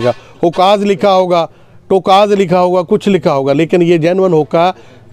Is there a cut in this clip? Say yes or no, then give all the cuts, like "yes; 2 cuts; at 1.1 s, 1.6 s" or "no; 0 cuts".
no; 0 cuts